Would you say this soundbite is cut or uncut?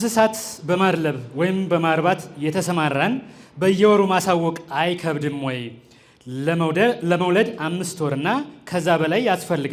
uncut